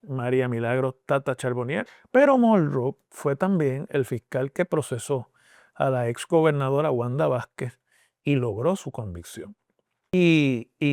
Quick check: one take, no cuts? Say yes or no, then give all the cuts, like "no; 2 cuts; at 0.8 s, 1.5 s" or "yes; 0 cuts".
no; 2 cuts; at 1.9 s, 10.1 s